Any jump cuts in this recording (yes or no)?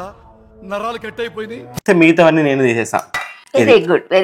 yes